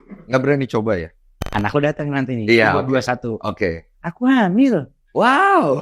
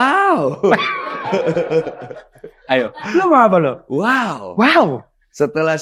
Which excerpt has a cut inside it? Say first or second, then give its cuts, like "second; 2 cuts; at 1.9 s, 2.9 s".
first; 1 cut; at 1.5 s